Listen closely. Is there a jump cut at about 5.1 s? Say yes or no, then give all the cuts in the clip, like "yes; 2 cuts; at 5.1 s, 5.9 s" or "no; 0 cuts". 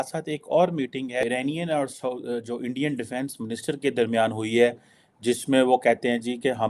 no; 1 cut; at 1.2 s